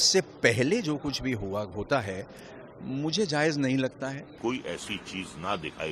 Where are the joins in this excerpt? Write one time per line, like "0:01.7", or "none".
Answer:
0:04.4